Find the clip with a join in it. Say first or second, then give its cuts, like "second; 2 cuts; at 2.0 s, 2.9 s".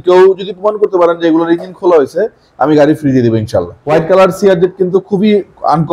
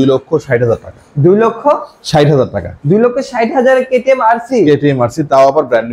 first; 1 cut; at 3.9 s